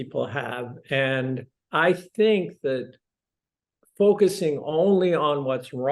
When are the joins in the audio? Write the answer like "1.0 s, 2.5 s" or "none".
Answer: 1.6 s

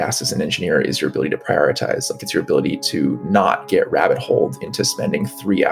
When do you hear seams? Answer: none

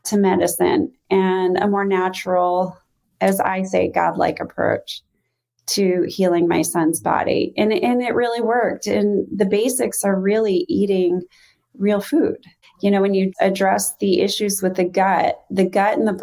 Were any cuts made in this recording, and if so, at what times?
12.6 s

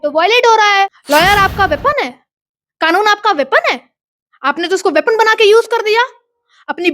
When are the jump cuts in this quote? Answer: 1.0 s

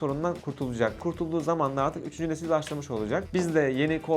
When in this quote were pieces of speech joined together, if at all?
1.0 s, 3.3 s

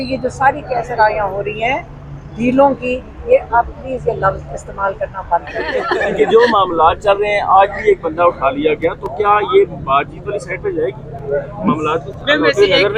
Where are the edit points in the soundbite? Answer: 5.8 s

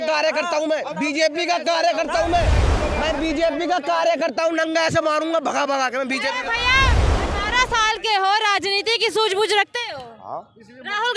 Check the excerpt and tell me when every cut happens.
7.0 s

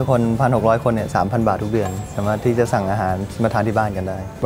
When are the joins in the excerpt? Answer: none

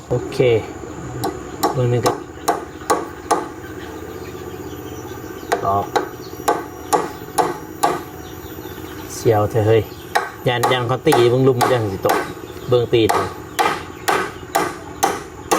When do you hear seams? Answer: none

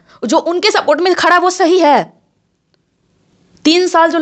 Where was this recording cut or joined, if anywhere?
none

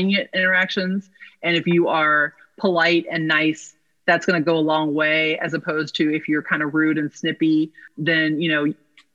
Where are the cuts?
7.9 s

